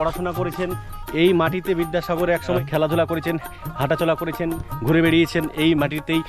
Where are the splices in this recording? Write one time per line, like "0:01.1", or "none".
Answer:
0:01.0